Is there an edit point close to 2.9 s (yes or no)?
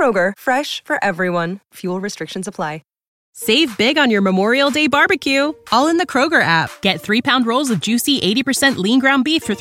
yes